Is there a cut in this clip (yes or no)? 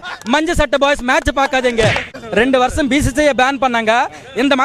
yes